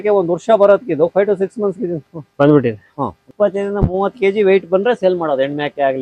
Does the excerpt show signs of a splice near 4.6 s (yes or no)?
no